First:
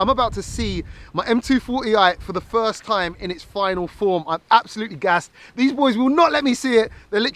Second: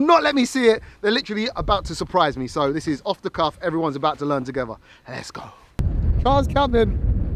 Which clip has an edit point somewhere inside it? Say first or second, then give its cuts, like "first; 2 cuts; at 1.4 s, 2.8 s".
second; 1 cut; at 5.8 s